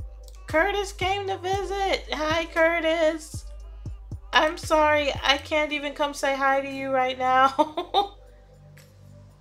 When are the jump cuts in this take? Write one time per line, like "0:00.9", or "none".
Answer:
0:08.2